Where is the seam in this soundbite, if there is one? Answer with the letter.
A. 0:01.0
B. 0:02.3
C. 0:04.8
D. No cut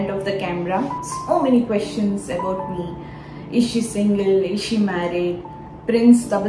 A